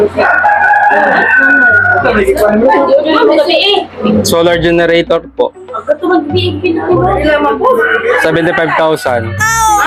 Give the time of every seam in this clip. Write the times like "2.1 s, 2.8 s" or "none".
none

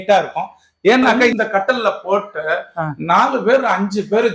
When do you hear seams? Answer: 1.3 s

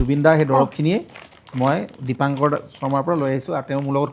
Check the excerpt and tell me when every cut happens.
none

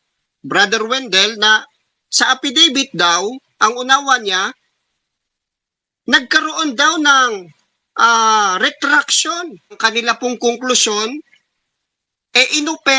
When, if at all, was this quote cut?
9.8 s

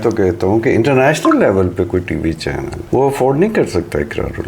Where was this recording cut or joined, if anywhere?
2.7 s

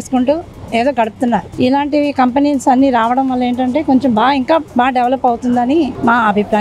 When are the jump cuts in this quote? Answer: none

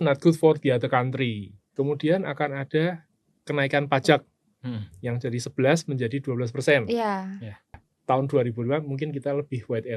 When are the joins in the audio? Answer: 1.6 s, 7.9 s

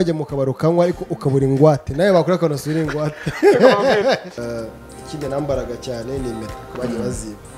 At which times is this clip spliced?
4.4 s

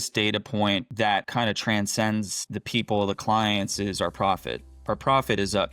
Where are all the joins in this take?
1.1 s

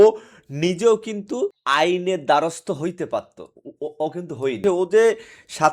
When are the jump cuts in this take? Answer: 4.6 s

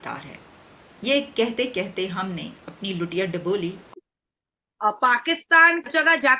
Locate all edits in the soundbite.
4.0 s

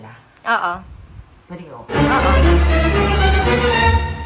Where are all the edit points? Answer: none

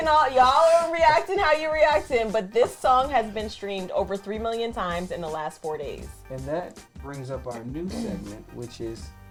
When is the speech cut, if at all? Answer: none

